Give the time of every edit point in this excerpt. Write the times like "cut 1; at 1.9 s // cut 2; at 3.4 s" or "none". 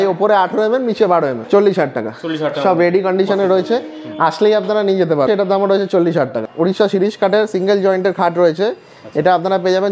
cut 1; at 1.4 s // cut 2; at 5.3 s // cut 3; at 6.5 s